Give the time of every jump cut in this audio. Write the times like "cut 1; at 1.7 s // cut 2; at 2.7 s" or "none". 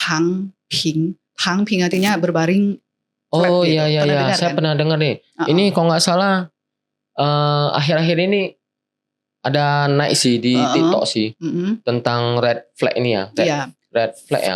none